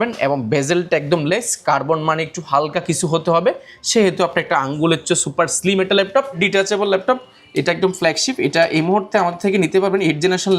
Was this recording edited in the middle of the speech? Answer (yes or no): yes